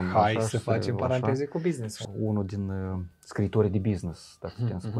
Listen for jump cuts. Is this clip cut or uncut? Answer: uncut